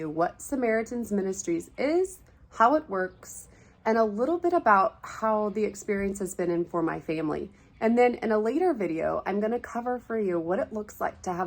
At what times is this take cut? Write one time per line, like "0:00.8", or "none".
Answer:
none